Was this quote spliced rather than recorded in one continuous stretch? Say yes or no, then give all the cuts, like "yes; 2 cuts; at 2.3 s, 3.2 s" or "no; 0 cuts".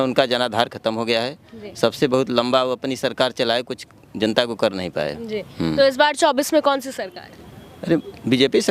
no; 0 cuts